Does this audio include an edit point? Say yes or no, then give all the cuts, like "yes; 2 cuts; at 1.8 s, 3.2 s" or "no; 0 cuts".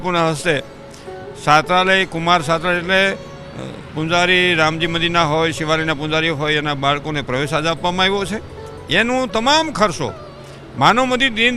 no; 0 cuts